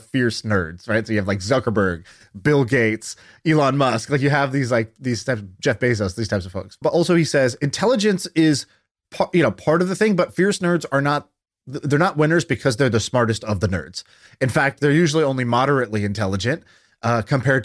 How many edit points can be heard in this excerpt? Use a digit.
1